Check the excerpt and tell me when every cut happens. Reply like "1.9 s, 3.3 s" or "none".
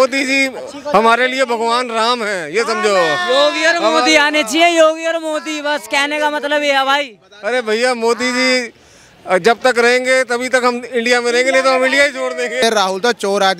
12.6 s